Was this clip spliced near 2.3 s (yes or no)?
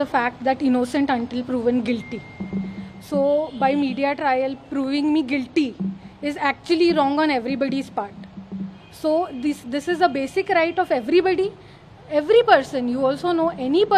no